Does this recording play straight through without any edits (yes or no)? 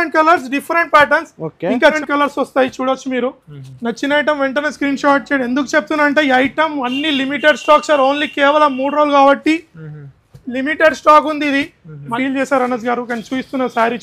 no